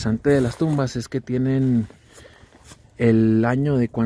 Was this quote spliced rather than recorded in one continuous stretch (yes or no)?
no